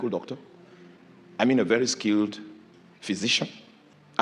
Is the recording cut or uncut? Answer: uncut